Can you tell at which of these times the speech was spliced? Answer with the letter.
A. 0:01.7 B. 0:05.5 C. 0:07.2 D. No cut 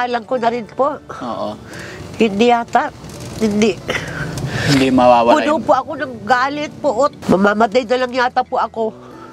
C